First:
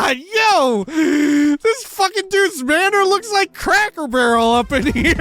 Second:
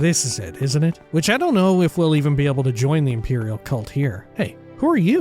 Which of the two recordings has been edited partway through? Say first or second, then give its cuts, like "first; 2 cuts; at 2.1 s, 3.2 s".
second; 2 cuts; at 1.0 s, 4.2 s